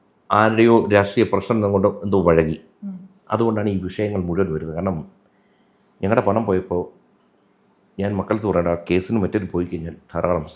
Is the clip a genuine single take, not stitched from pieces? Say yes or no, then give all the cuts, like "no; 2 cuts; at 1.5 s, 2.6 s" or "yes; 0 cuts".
yes; 0 cuts